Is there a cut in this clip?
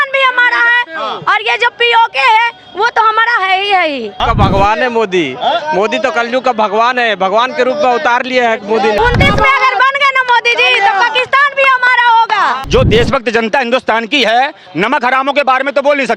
yes; 3 cuts; at 4.1 s, 9.0 s, 12.6 s

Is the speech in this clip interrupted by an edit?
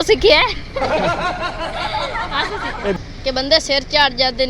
yes; 1 cut; at 3.0 s

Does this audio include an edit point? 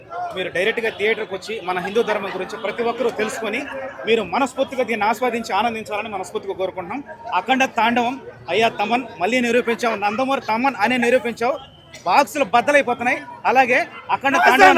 no; 0 cuts

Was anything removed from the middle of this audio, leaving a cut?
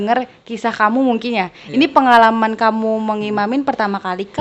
no; 0 cuts

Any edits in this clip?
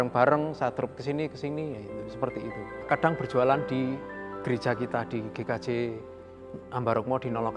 yes; 1 cut; at 2.8 s

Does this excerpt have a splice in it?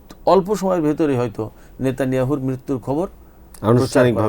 no; 0 cuts

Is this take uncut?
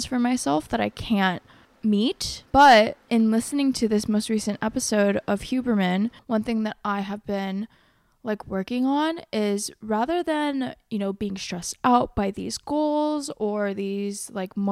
yes; 0 cuts

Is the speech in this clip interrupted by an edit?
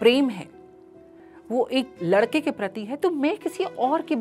no; 0 cuts

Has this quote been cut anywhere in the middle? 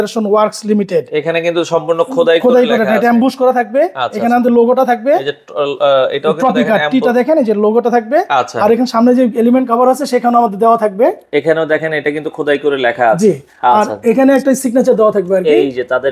no; 0 cuts

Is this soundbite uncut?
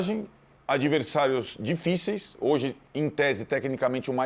yes; 0 cuts

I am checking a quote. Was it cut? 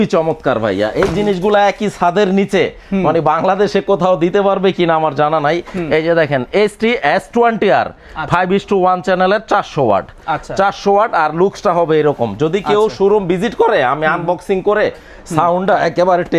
no; 0 cuts

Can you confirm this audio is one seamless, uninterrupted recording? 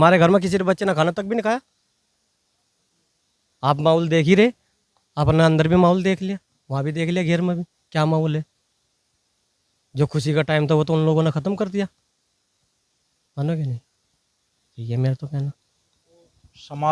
yes; 0 cuts

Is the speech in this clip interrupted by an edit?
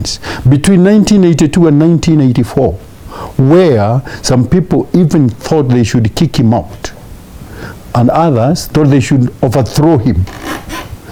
no; 0 cuts

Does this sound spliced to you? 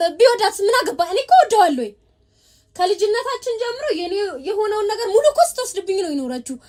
no; 0 cuts

